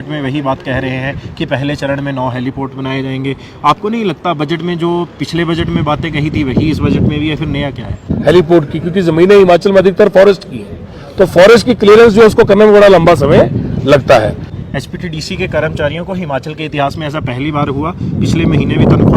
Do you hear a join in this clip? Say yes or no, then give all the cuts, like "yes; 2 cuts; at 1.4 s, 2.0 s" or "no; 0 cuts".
yes; 2 cuts; at 8.1 s, 14.5 s